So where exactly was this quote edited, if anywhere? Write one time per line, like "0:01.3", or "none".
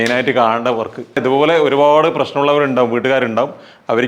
0:01.2